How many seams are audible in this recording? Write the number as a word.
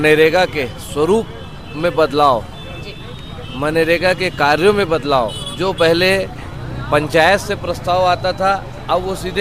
zero